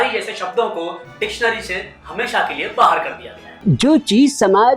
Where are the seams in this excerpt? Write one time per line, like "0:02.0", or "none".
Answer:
0:03.5